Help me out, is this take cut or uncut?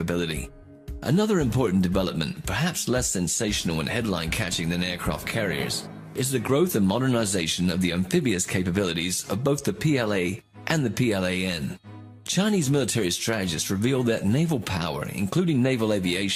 cut